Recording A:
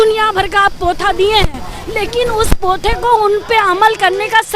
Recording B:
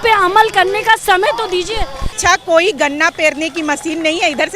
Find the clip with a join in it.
B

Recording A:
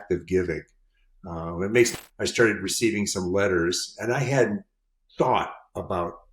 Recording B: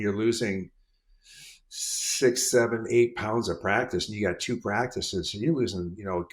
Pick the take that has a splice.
A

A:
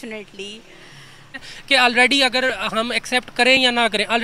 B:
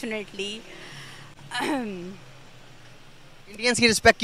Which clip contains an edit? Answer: A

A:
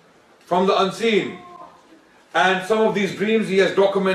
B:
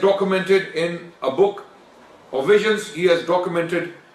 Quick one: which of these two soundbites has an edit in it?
A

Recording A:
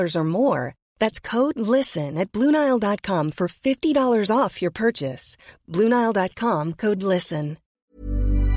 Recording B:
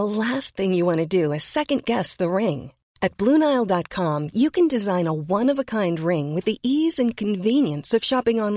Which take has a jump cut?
A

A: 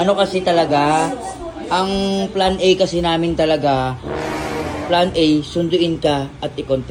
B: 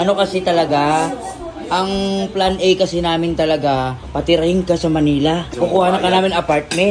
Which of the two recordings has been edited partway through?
B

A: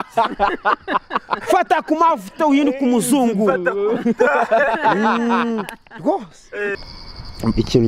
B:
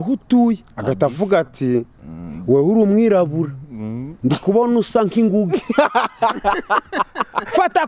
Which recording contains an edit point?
A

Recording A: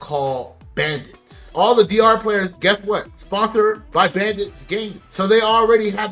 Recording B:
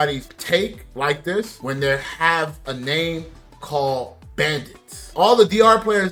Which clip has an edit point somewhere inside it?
A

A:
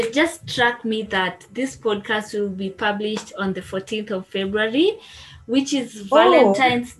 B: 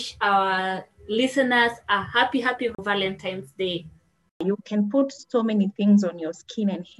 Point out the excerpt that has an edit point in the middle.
B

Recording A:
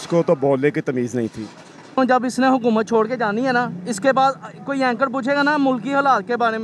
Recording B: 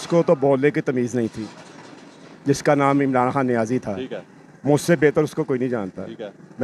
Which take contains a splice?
A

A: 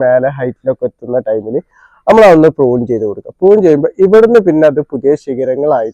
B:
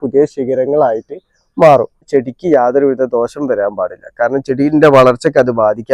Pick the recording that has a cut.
B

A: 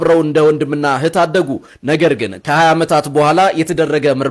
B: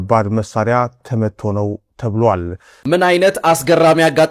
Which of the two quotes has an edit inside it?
B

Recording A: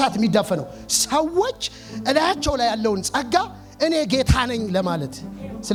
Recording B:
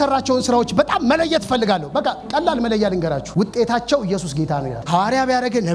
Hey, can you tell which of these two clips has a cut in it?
B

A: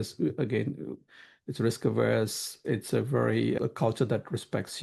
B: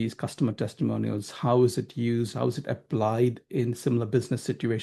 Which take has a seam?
A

